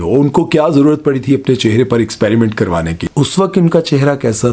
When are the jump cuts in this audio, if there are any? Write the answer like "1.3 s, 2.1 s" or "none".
3.1 s